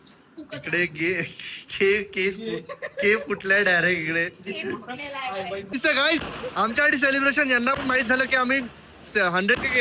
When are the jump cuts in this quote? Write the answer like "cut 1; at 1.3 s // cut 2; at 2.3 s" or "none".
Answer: cut 1; at 5.7 s